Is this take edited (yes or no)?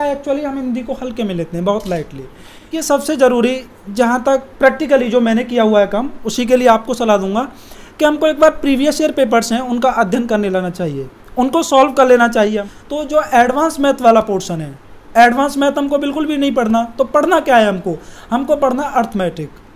yes